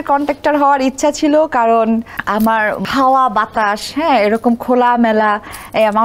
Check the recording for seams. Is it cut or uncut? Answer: cut